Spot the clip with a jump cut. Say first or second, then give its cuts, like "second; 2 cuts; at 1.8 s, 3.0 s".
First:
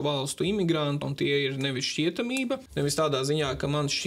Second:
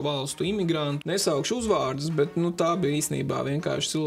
second; 1 cut; at 1.0 s